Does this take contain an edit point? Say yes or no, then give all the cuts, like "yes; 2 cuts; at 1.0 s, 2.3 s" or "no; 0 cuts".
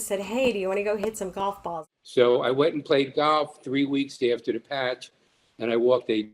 yes; 1 cut; at 1.7 s